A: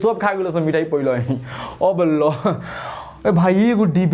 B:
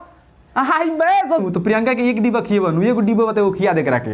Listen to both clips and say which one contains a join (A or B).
B